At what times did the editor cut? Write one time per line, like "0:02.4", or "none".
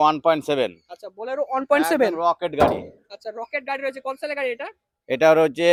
none